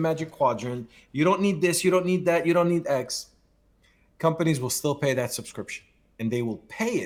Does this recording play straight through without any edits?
yes; 0 cuts

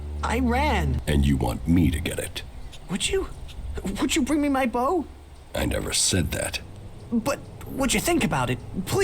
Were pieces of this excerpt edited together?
yes; 1 cut; at 1.0 s

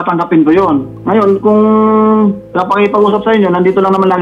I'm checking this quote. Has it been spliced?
yes; 2 cuts; at 0.9 s, 2.5 s

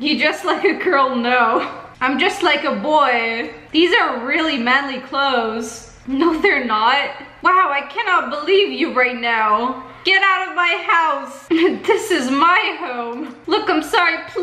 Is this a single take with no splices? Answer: no; 2 cuts; at 11.3 s, 13.3 s

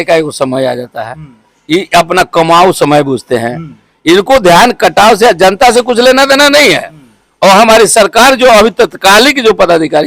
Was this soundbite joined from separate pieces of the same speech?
no; 0 cuts

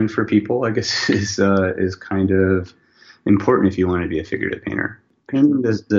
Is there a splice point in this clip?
yes; 1 cut; at 5.1 s

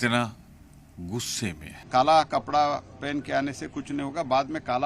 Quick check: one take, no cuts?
no; 1 cut; at 1.8 s

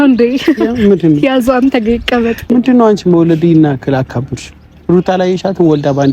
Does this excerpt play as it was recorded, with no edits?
no; 1 cut; at 2.4 s

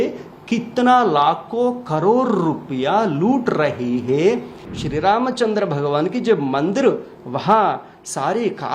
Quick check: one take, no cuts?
no; 1 cut; at 4.6 s

